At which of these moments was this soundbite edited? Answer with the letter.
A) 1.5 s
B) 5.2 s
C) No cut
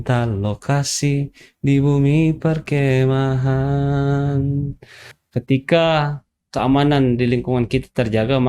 B